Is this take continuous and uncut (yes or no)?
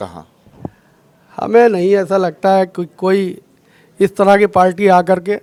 yes